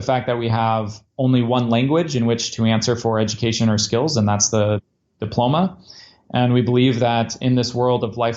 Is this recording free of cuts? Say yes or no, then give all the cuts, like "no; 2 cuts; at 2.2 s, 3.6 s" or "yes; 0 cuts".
yes; 0 cuts